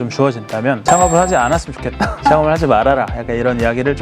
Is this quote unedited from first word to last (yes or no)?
no